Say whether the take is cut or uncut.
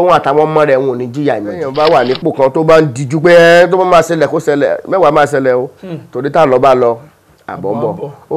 cut